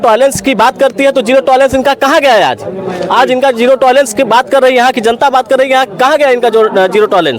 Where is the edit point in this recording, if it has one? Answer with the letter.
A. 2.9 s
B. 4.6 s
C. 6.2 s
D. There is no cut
D